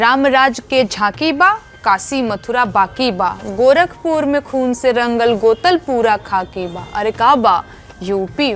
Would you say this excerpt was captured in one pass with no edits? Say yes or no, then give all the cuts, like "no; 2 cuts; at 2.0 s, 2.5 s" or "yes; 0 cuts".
yes; 0 cuts